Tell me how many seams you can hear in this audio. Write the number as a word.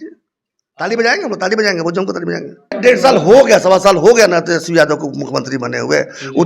one